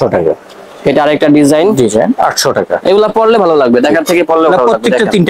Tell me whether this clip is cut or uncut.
uncut